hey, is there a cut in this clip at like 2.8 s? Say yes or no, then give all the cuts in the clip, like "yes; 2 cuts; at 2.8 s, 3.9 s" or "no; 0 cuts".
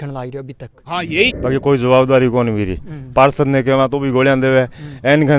no; 1 cut; at 1.3 s